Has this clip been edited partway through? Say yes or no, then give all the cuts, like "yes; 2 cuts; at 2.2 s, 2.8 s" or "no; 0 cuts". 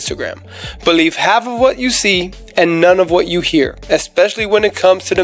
no; 0 cuts